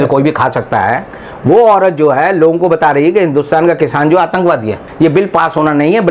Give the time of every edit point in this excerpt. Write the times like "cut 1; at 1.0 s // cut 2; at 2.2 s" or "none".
cut 1; at 4.9 s